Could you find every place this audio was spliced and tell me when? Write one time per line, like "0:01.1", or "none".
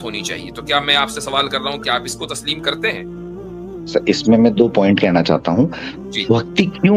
none